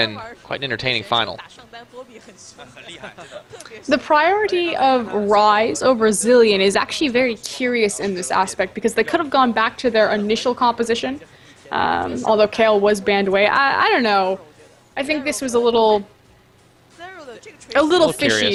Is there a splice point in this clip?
no; 0 cuts

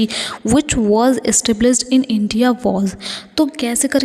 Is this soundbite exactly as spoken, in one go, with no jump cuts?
yes; 0 cuts

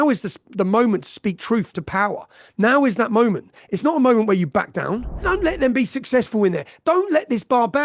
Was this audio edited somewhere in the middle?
yes; 1 cut; at 5.1 s

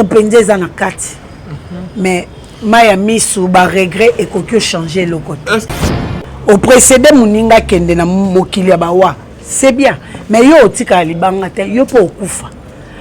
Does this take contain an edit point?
yes; 1 cut; at 5.9 s

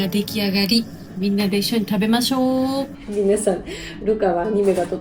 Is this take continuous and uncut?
yes; 0 cuts

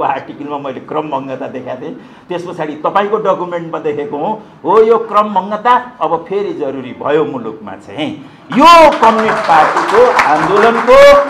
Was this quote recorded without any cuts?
yes; 0 cuts

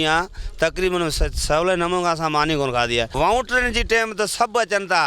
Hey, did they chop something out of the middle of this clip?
yes; 1 cut; at 3.1 s

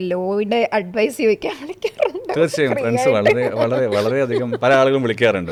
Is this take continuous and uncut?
yes; 0 cuts

